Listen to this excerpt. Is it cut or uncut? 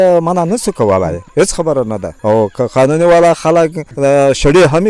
cut